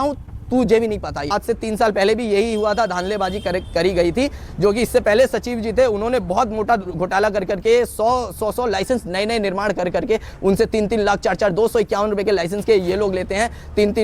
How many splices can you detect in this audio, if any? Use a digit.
1